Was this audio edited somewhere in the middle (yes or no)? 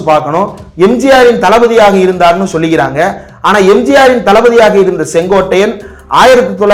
no